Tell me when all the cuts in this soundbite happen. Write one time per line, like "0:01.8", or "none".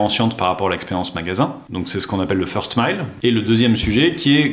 0:01.6
0:03.1